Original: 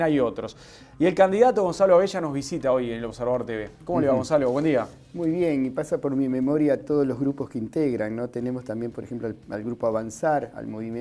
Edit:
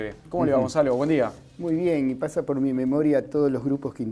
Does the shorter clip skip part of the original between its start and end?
no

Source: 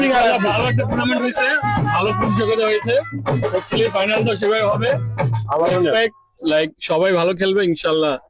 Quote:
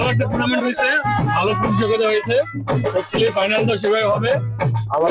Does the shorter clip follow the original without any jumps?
yes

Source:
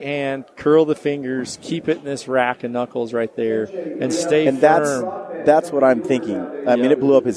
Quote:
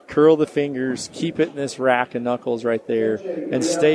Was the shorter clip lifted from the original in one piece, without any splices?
yes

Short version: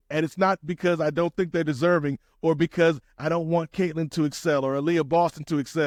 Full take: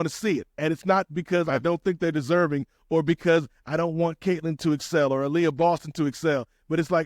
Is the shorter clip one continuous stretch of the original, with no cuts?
yes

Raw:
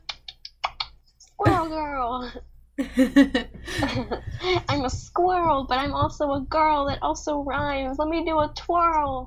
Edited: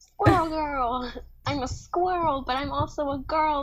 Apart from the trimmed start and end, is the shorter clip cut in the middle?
yes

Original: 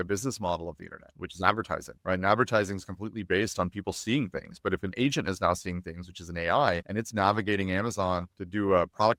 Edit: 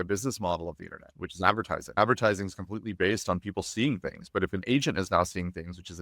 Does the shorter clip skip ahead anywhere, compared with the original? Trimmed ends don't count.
yes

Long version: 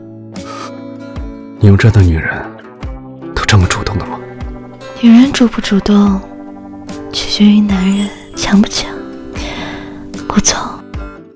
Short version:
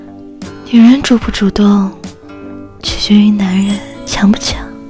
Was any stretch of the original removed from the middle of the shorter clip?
no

